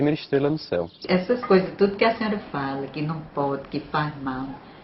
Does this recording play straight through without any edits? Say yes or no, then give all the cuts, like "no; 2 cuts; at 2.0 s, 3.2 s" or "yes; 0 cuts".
no; 1 cut; at 1.0 s